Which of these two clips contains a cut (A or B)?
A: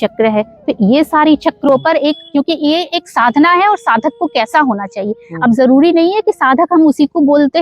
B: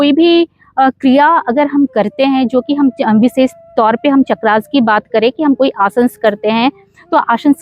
A